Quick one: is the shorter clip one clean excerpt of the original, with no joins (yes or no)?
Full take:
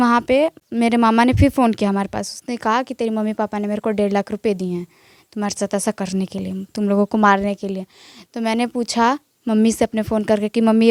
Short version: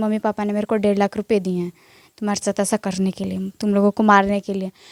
yes